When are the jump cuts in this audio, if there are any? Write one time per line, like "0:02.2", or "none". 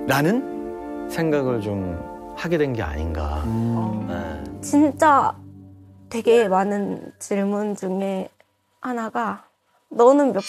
0:04.4